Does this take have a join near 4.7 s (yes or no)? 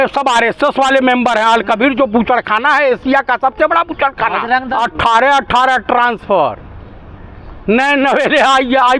yes